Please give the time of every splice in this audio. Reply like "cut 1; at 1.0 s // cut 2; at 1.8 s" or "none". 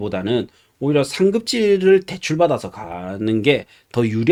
none